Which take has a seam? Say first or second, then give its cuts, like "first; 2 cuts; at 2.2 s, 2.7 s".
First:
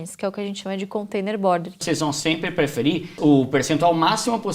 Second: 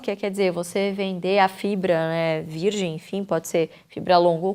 first; 2 cuts; at 1.8 s, 3.1 s